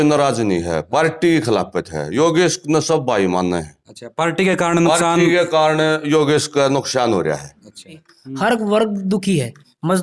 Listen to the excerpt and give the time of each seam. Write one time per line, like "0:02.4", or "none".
none